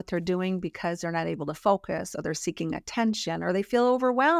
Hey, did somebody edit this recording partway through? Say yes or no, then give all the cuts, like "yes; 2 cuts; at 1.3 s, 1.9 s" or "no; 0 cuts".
no; 0 cuts